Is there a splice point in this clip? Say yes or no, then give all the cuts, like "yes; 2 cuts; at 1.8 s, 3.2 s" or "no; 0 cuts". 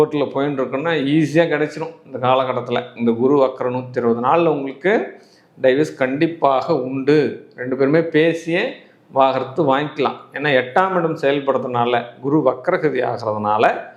no; 0 cuts